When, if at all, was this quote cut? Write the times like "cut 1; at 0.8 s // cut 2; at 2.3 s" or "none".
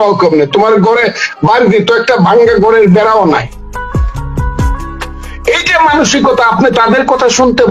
cut 1; at 4.1 s // cut 2; at 5.4 s